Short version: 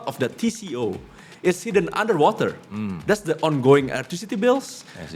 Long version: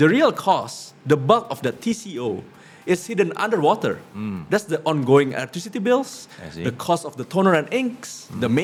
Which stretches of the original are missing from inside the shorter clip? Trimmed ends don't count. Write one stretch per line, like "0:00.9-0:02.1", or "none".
none

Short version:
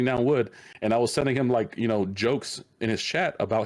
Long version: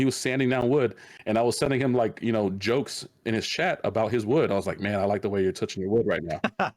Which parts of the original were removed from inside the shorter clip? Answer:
none

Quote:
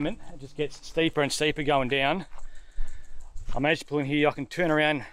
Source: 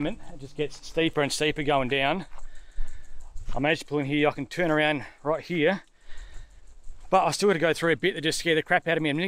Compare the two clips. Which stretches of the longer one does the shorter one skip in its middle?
none

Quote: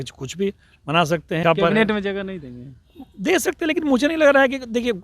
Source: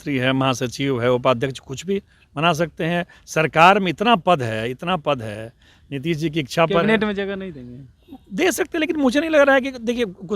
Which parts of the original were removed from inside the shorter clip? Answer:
0:02.9-0:06.5

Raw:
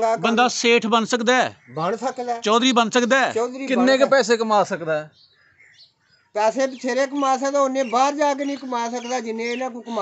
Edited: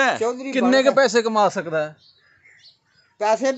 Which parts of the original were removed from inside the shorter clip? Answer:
none

